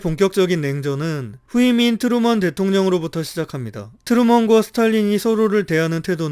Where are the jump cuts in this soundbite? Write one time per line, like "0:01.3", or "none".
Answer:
0:01.3